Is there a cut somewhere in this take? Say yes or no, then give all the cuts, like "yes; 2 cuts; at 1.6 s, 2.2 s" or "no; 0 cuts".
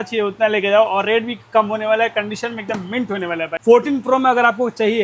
yes; 1 cut; at 3.5 s